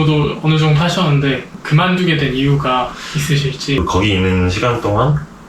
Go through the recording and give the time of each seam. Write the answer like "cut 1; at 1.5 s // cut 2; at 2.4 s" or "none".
cut 1; at 1.6 s // cut 2; at 3.8 s